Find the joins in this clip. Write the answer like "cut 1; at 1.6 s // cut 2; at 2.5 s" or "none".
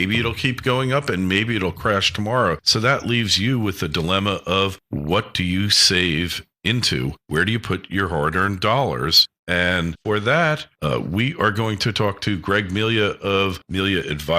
cut 1; at 4.9 s